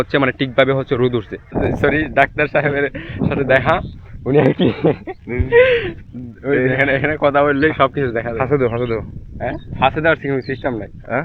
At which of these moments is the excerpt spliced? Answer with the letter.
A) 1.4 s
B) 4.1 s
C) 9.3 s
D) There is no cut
A